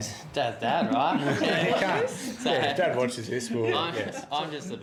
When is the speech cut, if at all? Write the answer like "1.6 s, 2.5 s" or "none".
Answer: none